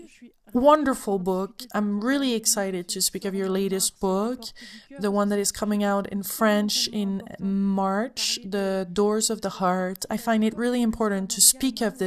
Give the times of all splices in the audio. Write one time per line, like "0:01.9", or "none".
0:08.8